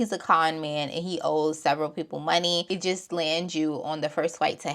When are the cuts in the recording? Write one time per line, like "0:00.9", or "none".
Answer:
0:02.7